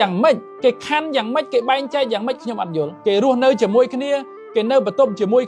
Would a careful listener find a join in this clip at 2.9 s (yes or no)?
yes